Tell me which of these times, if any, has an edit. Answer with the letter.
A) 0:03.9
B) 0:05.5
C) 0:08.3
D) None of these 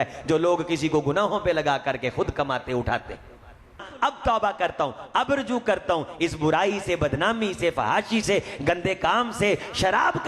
A